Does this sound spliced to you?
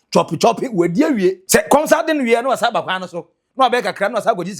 yes; 1 cut; at 1.4 s

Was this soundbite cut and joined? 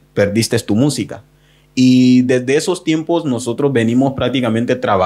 no; 0 cuts

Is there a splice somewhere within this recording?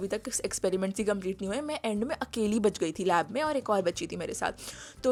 no; 0 cuts

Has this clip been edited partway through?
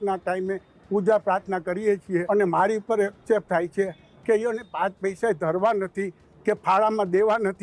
yes; 1 cut; at 2.2 s

